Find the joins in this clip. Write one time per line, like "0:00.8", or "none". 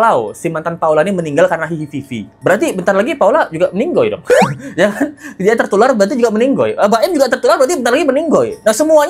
none